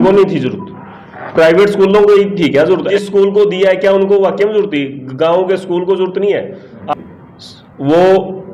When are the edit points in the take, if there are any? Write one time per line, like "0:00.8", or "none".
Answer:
0:02.9
0:06.8